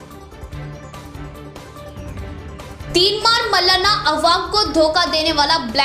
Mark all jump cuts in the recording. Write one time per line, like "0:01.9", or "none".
0:01.4
0:02.4